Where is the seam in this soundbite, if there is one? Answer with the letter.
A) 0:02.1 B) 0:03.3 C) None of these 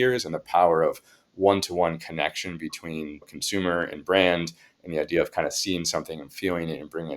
B